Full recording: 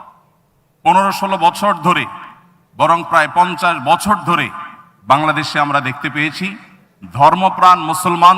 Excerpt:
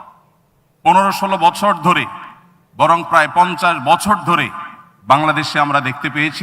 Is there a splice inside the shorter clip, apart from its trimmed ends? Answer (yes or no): no